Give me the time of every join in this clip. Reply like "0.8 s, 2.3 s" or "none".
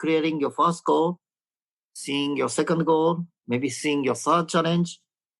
none

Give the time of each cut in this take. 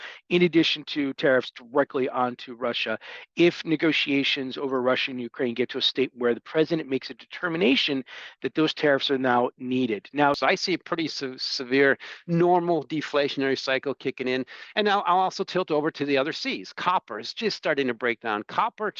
10.4 s

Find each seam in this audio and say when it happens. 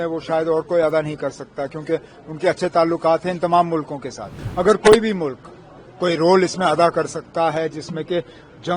4.4 s

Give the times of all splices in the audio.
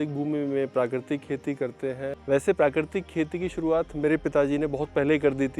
2.1 s

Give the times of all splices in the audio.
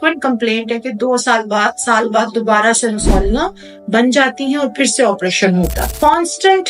5.8 s

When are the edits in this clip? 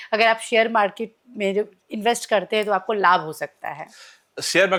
none

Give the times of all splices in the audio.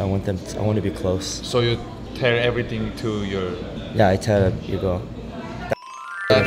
2.0 s, 3.7 s

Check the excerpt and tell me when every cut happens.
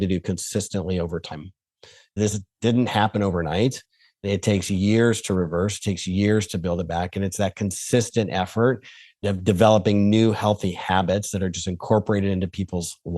2.3 s, 4.3 s, 9.2 s

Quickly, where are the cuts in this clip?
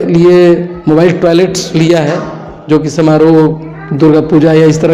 none

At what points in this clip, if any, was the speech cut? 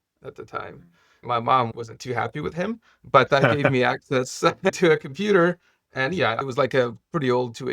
1.2 s, 6.0 s

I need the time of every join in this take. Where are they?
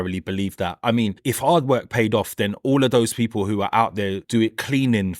1.2 s, 4.2 s

